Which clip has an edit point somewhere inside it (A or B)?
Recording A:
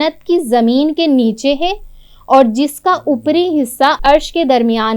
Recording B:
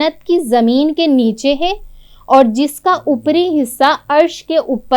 A